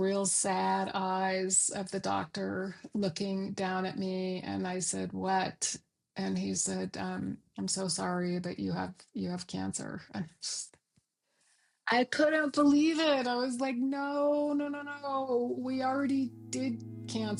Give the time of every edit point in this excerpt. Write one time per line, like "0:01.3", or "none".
none

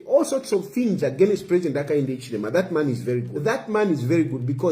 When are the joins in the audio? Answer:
0:03.6

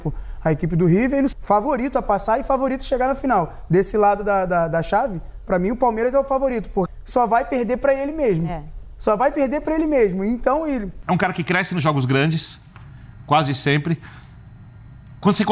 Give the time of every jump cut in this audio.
0:01.3
0:06.9
0:10.9

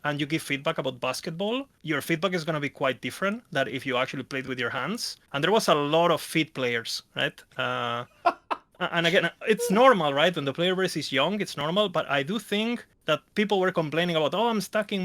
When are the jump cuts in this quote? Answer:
0:05.1
0:12.9

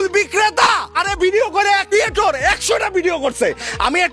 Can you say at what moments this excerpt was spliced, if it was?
0:00.9
0:01.9

